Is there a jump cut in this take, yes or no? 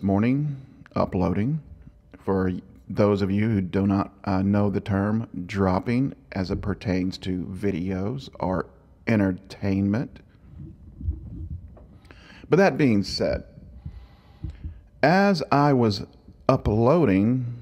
yes